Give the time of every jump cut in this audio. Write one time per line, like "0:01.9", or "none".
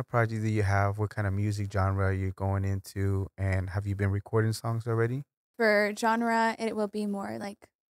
0:05.5